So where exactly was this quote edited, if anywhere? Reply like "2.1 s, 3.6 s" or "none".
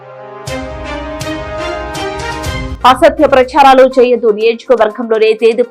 2.7 s